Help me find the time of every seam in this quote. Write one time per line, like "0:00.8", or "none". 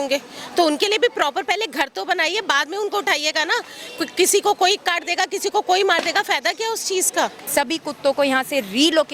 0:07.5